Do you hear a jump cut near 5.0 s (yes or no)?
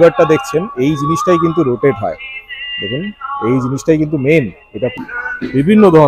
yes